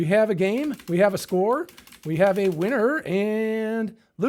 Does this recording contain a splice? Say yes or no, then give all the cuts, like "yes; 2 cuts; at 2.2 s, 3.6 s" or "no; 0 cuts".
no; 0 cuts